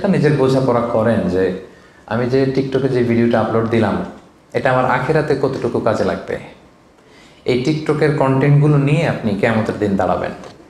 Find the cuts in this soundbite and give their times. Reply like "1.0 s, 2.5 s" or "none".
none